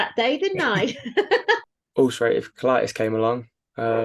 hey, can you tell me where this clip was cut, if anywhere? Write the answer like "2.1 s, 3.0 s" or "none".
1.6 s